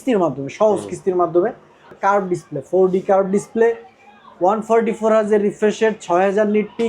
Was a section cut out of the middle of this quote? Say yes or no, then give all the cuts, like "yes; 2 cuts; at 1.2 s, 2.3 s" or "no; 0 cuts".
yes; 1 cut; at 1.9 s